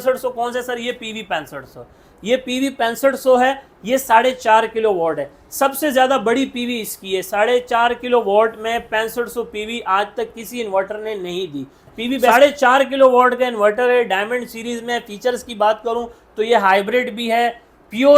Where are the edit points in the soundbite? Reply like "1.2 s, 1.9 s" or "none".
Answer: 12.3 s